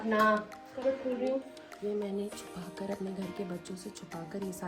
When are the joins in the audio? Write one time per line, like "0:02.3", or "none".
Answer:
0:01.6